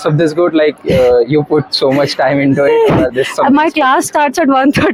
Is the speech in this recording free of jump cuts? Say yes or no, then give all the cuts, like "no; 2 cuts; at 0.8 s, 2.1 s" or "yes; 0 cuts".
yes; 0 cuts